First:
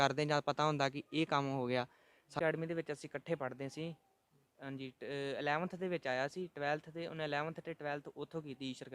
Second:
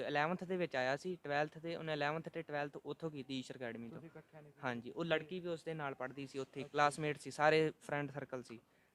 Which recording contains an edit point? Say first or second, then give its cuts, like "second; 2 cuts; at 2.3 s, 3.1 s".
first; 1 cut; at 2.2 s